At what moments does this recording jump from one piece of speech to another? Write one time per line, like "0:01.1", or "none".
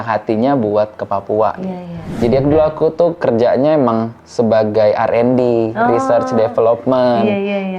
0:02.2

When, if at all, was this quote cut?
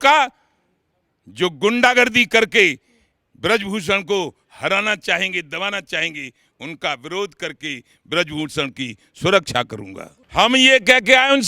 0:10.2

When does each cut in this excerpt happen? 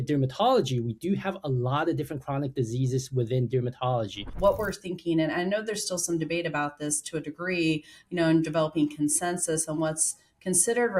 0:04.3

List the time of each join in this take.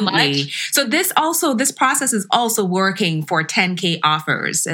none

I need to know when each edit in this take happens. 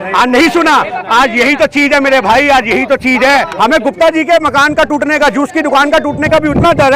0:03.5

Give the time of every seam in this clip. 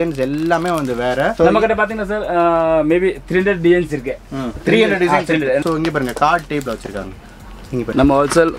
0:01.4
0:05.6
0:07.9

